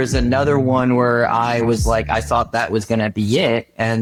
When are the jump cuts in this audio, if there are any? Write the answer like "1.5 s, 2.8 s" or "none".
none